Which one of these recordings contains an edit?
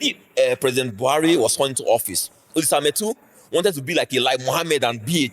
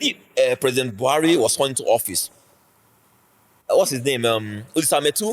first; 1 cut; at 2.4 s

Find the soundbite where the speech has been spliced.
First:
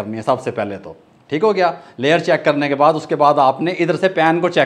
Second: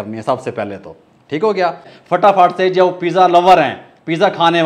second; 1 cut; at 1.9 s

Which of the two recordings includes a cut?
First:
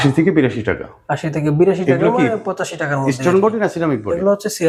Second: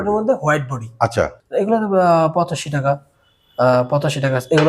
second; 1 cut; at 1.4 s

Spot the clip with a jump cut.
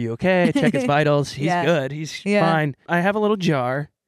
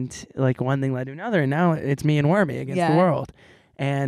first; 1 cut; at 2.8 s

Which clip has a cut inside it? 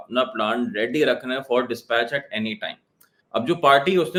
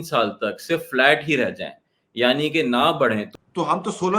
second; 1 cut; at 3.3 s

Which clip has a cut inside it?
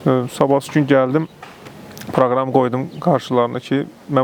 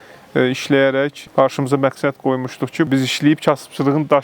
second; 2 cuts; at 1.2 s, 2.9 s

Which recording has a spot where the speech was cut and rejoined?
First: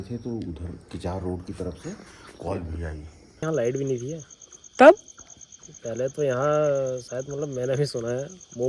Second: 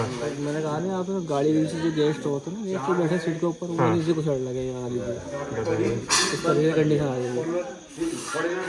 first; 1 cut; at 3.4 s

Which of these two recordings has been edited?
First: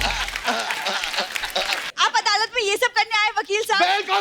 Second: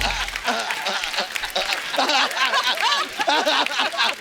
first; 1 cut; at 1.8 s

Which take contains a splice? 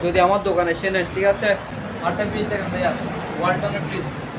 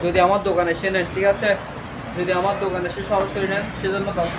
first; 1 cut; at 1.8 s

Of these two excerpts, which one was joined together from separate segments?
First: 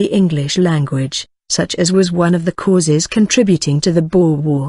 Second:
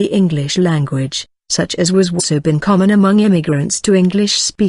first; 1 cut; at 2.1 s

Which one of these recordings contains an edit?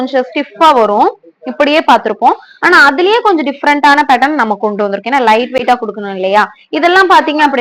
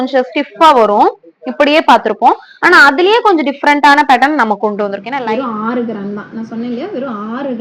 second; 1 cut; at 5.1 s

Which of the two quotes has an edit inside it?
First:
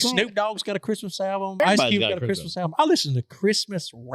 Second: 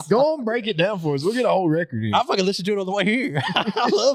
first; 1 cut; at 1.6 s

